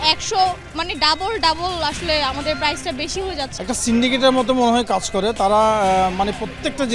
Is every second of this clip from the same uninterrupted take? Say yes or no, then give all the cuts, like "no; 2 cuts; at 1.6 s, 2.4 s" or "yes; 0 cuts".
no; 1 cut; at 3.6 s